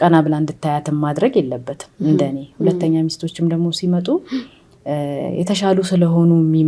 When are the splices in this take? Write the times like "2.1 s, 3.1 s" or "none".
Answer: none